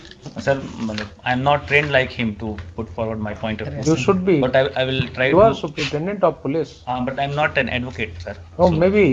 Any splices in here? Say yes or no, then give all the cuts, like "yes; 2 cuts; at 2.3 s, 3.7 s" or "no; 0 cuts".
no; 0 cuts